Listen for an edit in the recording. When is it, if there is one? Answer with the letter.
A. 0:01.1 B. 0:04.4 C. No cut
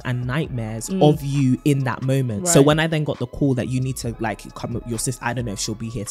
C